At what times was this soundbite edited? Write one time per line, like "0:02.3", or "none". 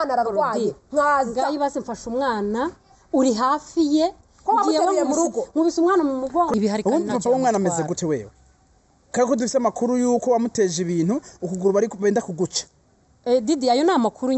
0:06.5